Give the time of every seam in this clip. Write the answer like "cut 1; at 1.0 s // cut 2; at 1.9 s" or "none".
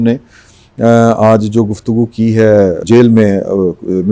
cut 1; at 2.8 s